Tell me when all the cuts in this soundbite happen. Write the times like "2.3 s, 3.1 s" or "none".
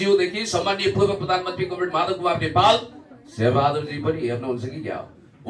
none